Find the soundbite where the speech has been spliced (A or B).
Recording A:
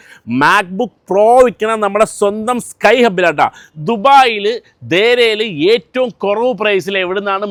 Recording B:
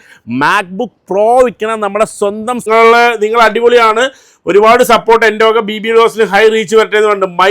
B